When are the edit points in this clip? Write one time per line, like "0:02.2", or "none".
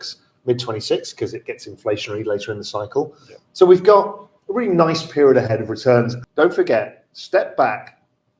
0:06.2